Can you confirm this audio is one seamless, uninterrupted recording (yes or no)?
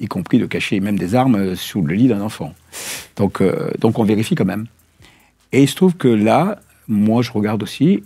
yes